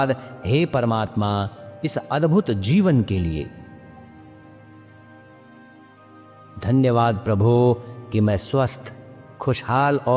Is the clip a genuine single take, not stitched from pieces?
yes; 0 cuts

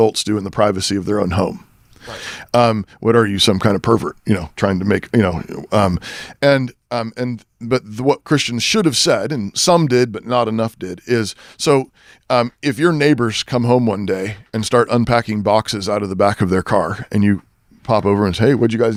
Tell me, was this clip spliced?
no; 0 cuts

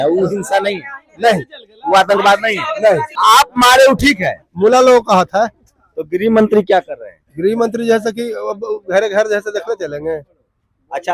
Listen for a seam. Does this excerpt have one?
yes; 2 cuts; at 3.1 s, 4.4 s

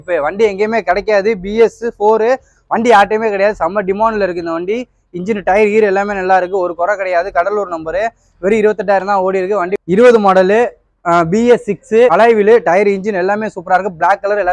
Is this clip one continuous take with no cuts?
no; 2 cuts; at 9.7 s, 12.1 s

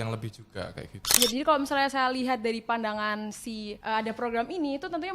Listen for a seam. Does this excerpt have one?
yes; 2 cuts; at 1.2 s, 3.8 s

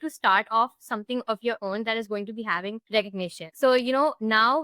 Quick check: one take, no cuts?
no; 1 cut; at 3.1 s

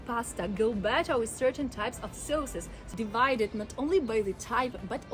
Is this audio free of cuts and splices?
no; 1 cut; at 2.8 s

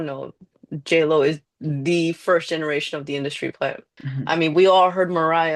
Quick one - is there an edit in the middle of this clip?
yes; 1 cut; at 3.9 s

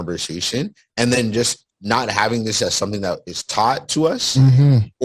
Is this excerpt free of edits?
no; 1 cut; at 3.8 s

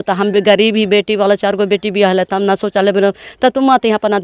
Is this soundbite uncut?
yes; 0 cuts

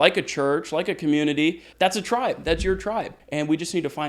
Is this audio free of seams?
no; 2 cuts; at 1.7 s, 3.2 s

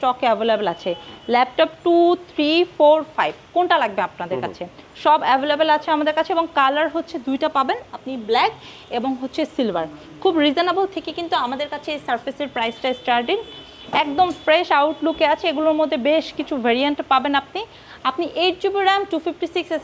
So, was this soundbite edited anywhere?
no; 0 cuts

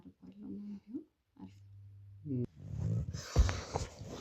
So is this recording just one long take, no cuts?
no; 1 cut; at 2.5 s

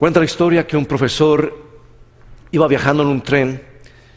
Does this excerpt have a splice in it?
yes; 1 cut; at 2.0 s

